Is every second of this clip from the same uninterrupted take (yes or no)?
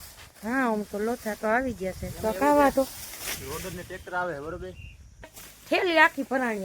no